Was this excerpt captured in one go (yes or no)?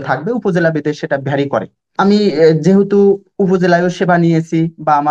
no